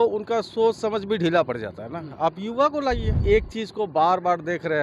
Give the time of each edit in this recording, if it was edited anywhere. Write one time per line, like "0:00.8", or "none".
0:03.1